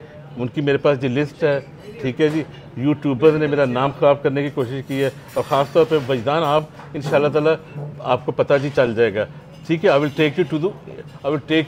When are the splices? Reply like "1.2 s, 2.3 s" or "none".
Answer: none